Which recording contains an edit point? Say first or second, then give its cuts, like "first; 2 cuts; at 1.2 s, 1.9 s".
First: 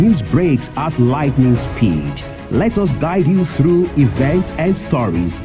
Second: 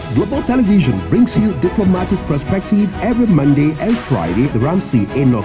second; 1 cut; at 4.5 s